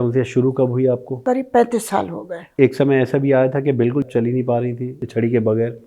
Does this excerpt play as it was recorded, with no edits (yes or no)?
no